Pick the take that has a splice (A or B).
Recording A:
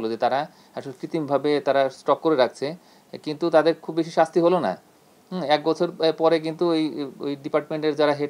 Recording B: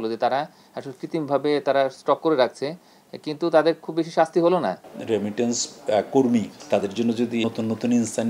B